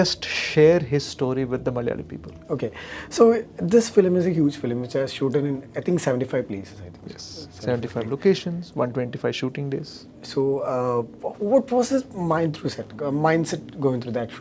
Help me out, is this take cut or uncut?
uncut